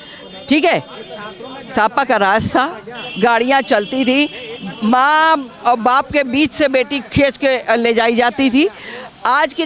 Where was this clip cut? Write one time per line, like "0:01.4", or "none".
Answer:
none

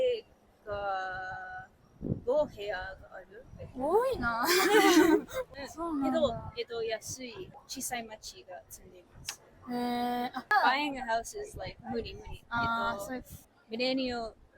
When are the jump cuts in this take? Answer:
0:05.4
0:07.5
0:10.4

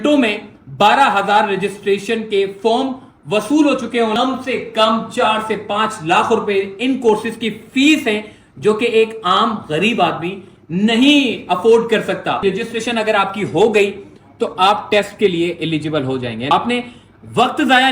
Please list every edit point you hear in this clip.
0:04.2
0:12.4
0:16.5

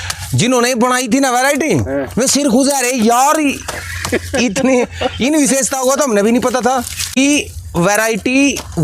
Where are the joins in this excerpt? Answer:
0:07.2

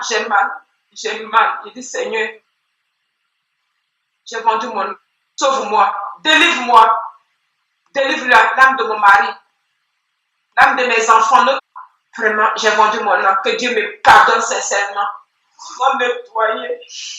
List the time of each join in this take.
0:11.6
0:15.6

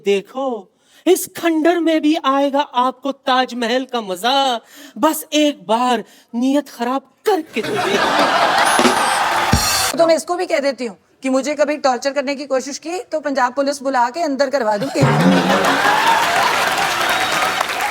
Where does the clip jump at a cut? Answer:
0:09.9

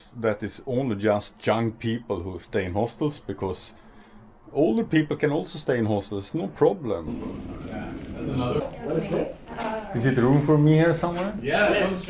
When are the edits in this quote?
0:07.2
0:08.6

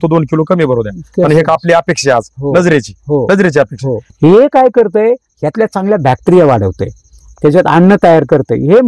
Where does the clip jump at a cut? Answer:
0:04.0

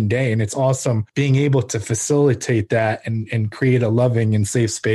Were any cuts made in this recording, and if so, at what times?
0:01.1

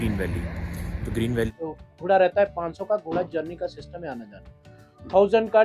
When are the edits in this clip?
0:01.5

